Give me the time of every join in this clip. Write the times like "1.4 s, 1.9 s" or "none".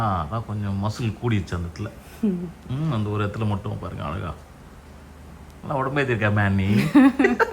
none